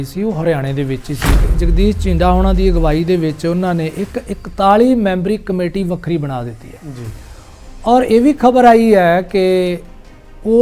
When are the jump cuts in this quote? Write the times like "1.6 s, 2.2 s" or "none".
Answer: 1.6 s